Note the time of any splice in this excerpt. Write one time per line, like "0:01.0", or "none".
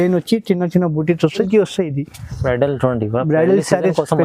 0:01.5